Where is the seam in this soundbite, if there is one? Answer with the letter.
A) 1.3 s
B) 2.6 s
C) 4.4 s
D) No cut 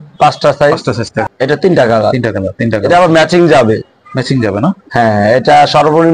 A